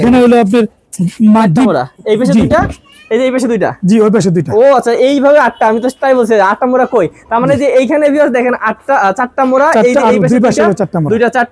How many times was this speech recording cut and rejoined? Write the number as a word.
zero